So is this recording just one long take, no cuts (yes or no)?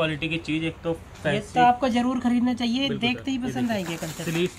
yes